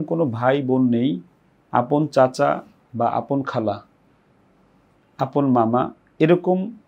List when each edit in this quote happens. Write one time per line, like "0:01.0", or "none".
none